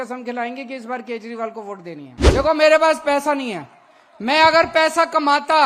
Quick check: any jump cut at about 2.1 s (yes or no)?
yes